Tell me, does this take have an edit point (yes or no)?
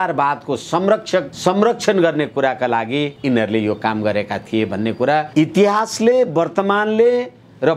yes